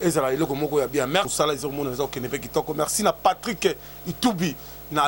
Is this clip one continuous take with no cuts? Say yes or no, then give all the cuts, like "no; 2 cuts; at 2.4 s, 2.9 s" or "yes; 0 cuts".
no; 1 cut; at 1.3 s